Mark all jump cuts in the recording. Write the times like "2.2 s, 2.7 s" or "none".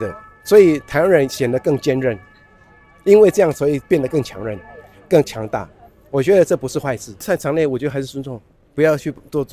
7.2 s